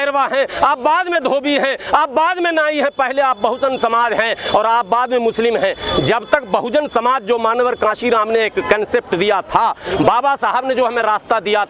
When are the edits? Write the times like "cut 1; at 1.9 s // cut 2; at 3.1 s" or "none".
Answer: none